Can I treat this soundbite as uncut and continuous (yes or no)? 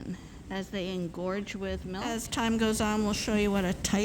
no